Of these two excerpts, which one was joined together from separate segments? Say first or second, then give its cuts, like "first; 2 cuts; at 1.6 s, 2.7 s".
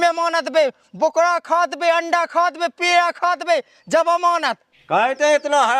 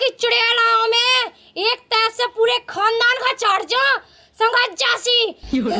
first; 1 cut; at 4.6 s